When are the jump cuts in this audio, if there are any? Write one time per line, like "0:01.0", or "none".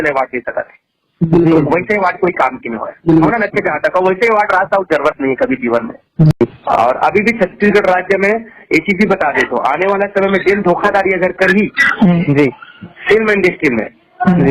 0:06.3